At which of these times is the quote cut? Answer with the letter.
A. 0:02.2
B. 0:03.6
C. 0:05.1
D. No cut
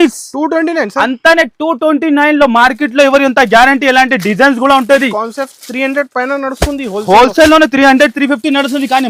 D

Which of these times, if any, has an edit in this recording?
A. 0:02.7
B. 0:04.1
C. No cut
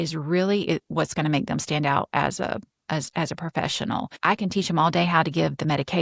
B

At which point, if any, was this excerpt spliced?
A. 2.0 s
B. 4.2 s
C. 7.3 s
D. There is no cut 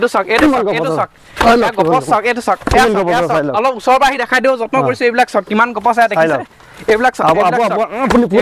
D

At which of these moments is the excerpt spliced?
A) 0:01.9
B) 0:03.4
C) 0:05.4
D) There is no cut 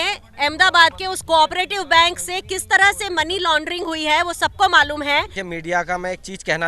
C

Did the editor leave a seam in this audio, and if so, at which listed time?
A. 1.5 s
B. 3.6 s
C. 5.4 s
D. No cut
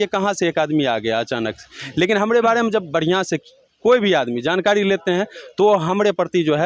D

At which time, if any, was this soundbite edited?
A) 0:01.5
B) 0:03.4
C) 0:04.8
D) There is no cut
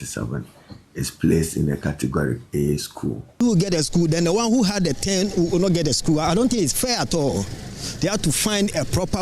B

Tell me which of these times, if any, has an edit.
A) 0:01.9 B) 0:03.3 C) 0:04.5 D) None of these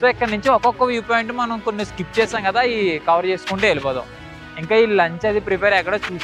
D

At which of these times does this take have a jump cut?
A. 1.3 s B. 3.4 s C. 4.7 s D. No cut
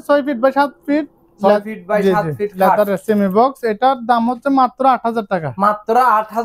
D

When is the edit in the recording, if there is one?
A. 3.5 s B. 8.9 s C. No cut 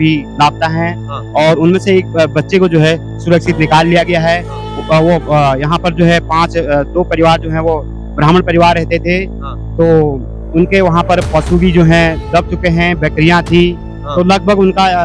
C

